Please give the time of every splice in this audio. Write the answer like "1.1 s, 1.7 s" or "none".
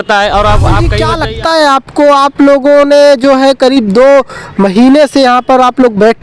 1.0 s